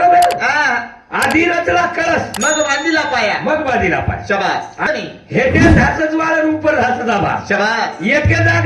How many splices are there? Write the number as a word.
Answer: one